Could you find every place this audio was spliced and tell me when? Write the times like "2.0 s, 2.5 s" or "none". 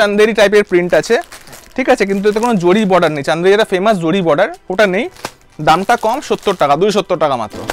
none